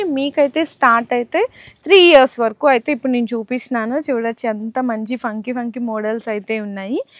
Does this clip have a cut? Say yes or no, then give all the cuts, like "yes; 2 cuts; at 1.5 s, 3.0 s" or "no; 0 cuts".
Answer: no; 0 cuts